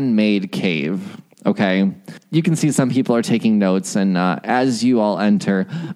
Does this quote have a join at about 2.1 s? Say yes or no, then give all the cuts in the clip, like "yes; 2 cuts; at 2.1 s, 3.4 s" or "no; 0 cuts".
yes; 1 cut; at 2.1 s